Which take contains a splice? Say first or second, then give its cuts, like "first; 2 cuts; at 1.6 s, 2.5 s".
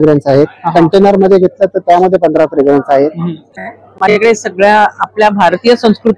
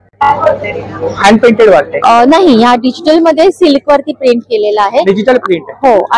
first; 1 cut; at 3.5 s